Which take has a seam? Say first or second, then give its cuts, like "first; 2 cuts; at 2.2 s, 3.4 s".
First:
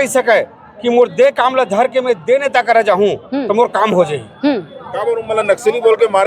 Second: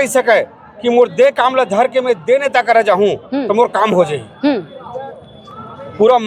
first; 1 cut; at 4.9 s